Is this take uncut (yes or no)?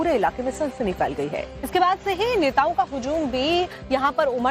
no